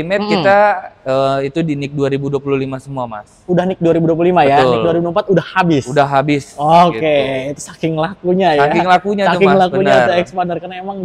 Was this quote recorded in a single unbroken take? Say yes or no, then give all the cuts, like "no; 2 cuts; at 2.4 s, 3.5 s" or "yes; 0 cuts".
yes; 0 cuts